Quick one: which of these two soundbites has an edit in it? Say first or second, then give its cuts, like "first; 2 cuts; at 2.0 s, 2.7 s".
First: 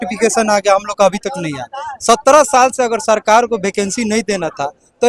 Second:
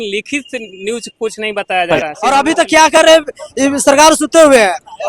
second; 1 cut; at 2.1 s